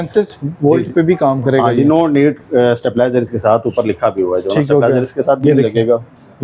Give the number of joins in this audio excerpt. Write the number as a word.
zero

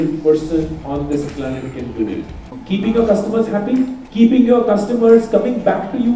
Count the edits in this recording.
two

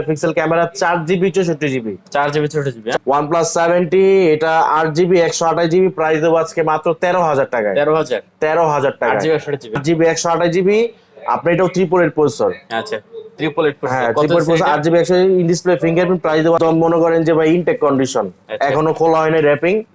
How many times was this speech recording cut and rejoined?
three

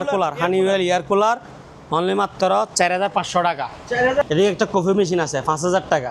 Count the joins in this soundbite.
one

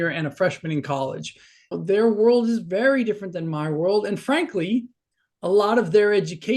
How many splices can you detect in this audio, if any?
one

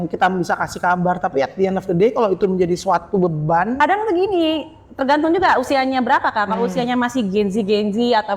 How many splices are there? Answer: one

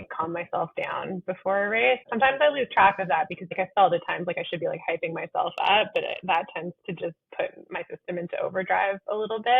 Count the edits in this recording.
two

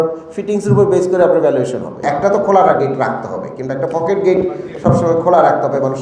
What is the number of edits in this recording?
one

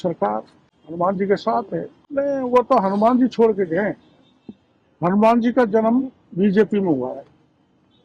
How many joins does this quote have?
two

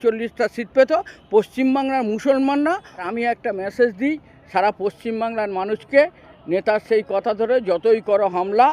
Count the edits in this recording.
one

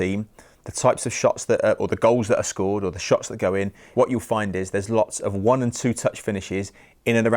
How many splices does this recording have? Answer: one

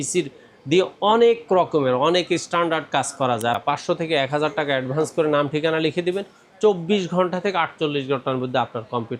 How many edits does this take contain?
one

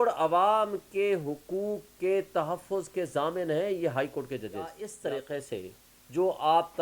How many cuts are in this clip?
one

